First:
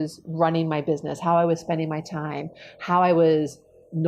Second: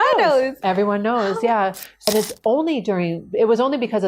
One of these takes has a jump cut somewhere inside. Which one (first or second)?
second